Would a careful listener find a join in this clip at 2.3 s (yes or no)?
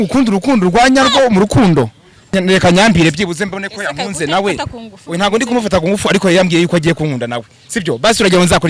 yes